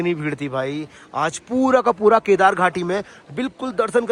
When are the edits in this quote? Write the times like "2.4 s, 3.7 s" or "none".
none